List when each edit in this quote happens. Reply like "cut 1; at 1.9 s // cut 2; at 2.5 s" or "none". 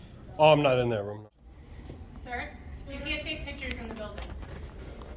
cut 1; at 1.1 s